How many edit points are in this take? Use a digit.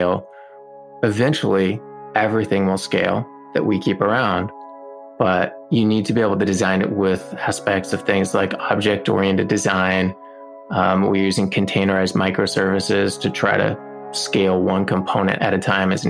2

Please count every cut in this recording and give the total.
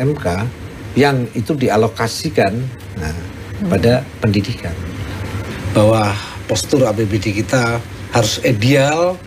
1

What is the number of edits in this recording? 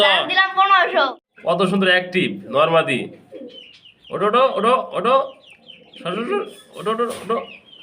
1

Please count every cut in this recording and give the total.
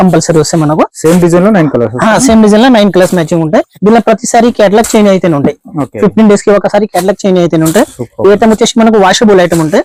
0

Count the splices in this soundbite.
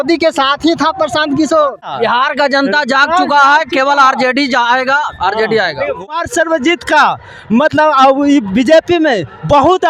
2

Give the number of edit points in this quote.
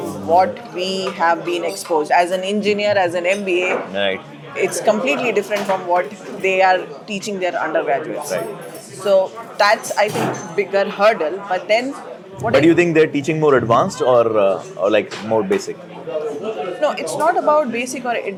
0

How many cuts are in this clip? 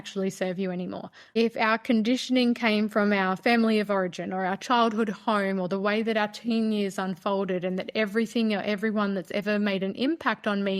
1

